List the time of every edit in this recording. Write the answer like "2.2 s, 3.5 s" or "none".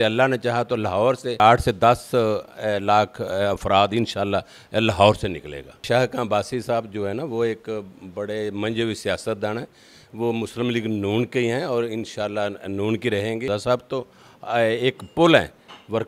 1.4 s, 5.8 s, 13.5 s